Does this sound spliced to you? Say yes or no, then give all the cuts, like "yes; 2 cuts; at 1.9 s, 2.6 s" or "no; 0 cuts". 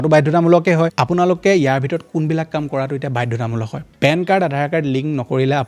yes; 2 cuts; at 1.0 s, 3.8 s